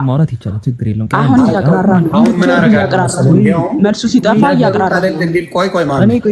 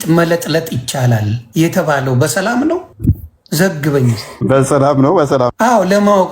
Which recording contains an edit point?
second; 4 cuts; at 1.4 s, 2.9 s, 4.3 s, 5.5 s

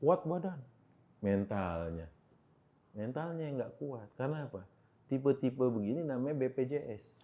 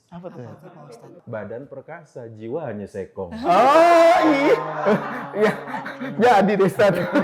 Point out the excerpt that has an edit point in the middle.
second; 1 cut; at 1.2 s

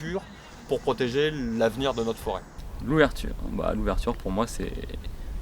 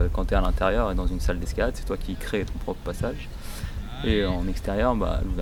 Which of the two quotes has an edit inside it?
first; 1 cut; at 2.5 s

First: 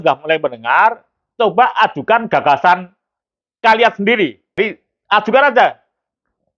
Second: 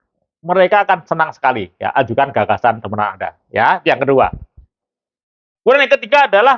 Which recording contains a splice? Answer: first; 1 cut; at 4.6 s

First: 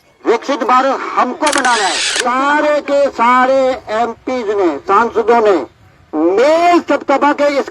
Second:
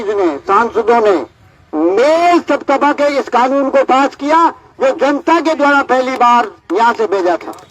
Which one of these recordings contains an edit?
first; 1 cut; at 2.1 s

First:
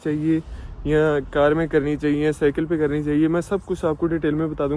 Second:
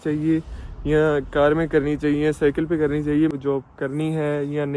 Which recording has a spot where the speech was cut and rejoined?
second; 1 cut; at 3.3 s

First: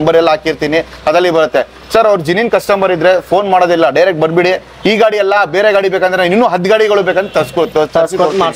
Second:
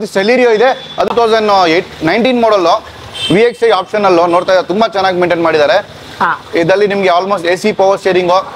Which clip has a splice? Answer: second; 1 cut; at 1.1 s

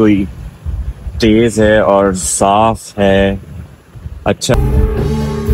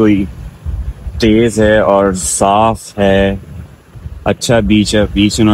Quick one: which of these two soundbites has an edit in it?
first; 1 cut; at 4.5 s

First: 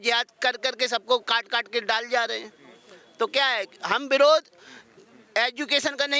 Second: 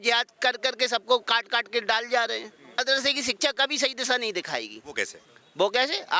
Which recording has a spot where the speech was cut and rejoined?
second; 1 cut; at 2.8 s

